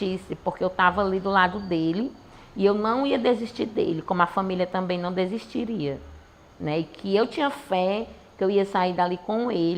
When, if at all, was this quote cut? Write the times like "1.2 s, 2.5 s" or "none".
none